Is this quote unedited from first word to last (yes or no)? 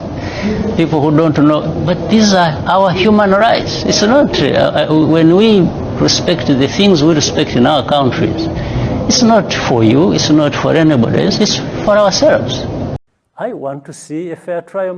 no